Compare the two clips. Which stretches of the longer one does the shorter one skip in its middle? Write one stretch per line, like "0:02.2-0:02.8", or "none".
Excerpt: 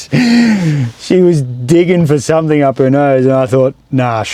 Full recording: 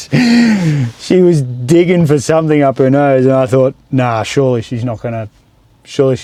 none